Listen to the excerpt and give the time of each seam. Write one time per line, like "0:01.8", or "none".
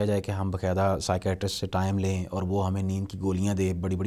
none